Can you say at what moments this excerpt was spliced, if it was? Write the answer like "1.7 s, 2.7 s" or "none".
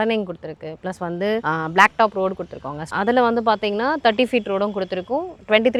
none